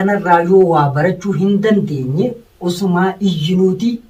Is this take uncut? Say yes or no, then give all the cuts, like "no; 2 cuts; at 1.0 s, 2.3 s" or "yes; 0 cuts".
yes; 0 cuts